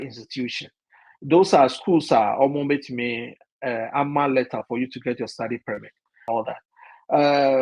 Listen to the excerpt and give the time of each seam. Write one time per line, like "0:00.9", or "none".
0:06.1